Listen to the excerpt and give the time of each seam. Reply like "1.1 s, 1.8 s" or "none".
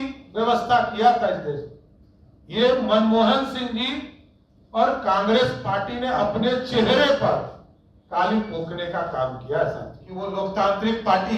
10.2 s